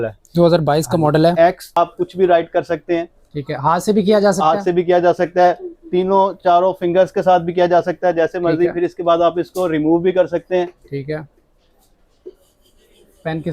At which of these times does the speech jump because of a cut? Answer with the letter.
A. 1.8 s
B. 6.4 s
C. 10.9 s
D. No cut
A